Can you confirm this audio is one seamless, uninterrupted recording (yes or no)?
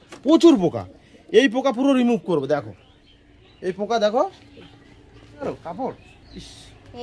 yes